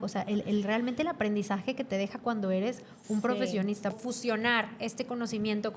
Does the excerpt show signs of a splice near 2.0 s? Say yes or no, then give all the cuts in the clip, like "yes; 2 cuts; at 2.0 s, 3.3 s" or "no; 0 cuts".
no; 1 cut; at 3.9 s